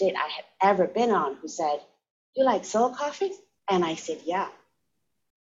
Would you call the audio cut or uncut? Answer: cut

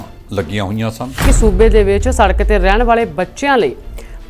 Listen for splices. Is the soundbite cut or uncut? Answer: cut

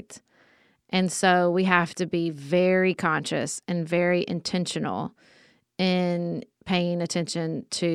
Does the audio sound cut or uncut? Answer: uncut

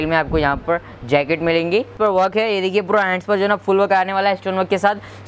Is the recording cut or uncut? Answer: cut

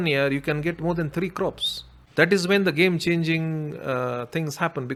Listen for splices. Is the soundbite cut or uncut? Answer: uncut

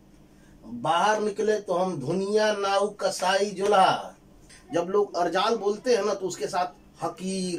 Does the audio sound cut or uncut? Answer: cut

